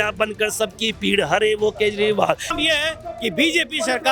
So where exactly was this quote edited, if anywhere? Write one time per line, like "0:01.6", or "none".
0:02.5